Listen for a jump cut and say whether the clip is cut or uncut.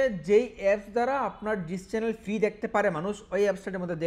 uncut